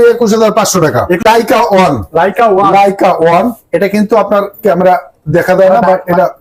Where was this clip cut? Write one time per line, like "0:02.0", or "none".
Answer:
0:01.2